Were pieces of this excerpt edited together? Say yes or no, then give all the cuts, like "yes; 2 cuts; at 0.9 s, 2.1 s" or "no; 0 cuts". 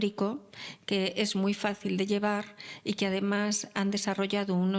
no; 0 cuts